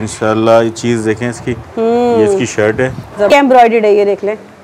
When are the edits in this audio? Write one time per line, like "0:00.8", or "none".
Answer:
0:03.3

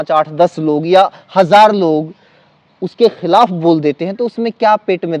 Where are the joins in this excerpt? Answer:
none

